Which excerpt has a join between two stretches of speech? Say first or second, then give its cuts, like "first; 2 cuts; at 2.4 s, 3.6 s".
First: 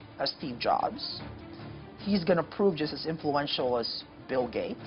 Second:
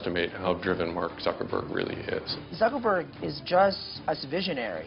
second; 2 cuts; at 2.4 s, 3.9 s